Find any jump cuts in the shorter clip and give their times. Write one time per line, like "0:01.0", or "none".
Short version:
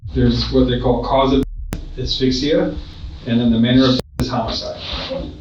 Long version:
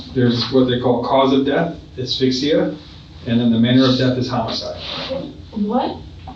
none